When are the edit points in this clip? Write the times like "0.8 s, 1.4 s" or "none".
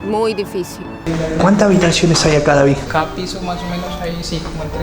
0.9 s, 2.8 s

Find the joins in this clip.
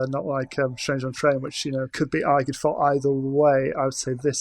1.9 s

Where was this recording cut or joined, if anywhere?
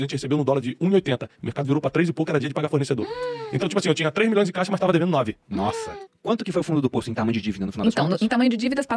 6.1 s

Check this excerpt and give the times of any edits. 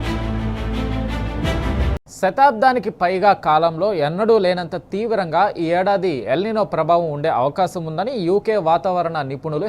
none

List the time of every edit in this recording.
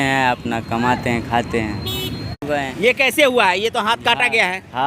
2.7 s

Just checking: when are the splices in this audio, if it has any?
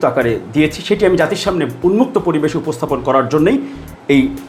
none

